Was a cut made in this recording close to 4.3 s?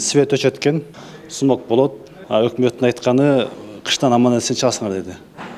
no; 2 cuts; at 0.9 s, 2.1 s

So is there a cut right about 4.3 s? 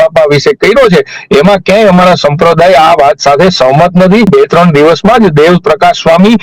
yes; 1 cut; at 4.3 s

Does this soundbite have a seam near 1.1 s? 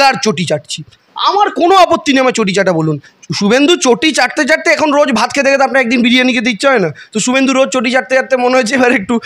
no; 1 cut; at 3.1 s

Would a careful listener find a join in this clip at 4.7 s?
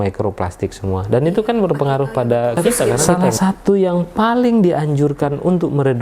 no; 1 cut; at 3.0 s

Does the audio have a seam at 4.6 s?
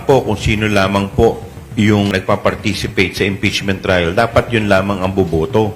no; 1 cut; at 2.1 s

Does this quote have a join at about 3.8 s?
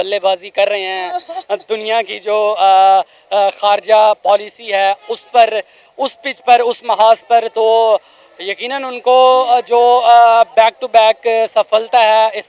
no; 0 cuts

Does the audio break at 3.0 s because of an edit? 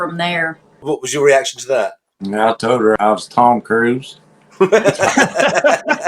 yes; 2 cuts; at 0.8 s, 3.0 s

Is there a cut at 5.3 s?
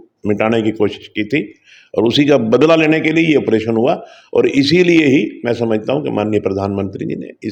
no; 0 cuts

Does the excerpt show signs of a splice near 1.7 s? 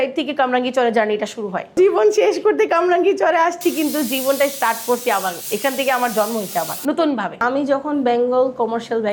no; 0 cuts

